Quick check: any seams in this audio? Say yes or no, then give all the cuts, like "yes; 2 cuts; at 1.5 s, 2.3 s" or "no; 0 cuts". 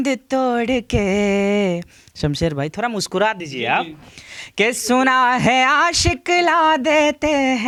no; 0 cuts